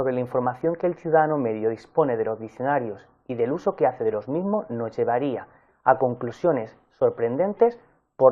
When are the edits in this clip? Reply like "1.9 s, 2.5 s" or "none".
4.5 s